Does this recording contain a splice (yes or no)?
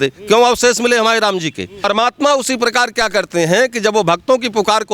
yes